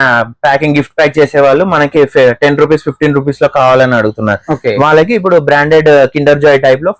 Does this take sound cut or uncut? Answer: uncut